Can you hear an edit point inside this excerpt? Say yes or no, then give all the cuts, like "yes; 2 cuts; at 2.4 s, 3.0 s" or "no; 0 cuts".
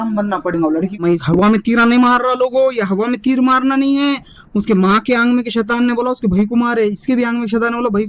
yes; 1 cut; at 1.0 s